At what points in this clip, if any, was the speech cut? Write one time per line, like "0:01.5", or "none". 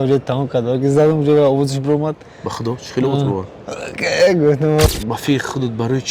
0:04.9